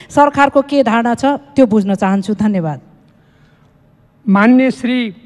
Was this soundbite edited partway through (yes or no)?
no